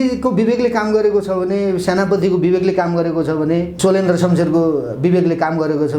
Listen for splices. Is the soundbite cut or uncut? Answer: cut